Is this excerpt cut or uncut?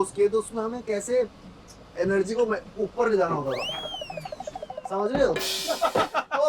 uncut